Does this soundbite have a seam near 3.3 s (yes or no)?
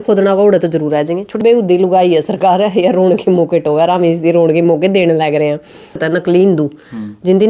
no